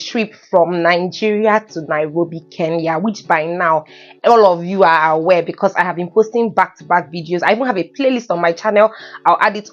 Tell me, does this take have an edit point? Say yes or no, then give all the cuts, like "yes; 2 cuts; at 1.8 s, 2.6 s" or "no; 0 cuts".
no; 0 cuts